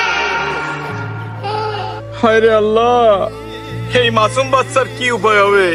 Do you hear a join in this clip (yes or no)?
no